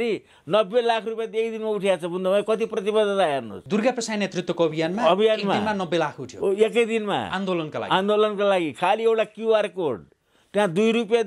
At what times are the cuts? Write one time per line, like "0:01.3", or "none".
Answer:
0:03.5